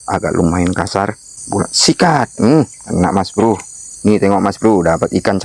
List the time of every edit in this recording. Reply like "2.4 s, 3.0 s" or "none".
1.4 s